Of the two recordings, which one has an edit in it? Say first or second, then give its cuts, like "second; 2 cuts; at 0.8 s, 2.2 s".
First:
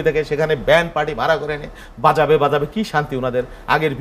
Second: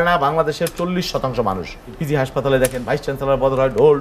second; 1 cut; at 2.0 s